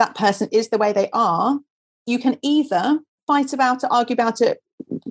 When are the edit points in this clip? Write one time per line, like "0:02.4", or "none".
0:02.0
0:03.2